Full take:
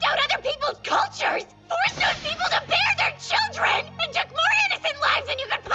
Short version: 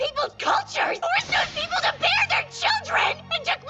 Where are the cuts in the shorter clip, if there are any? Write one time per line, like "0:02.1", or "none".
0:01.0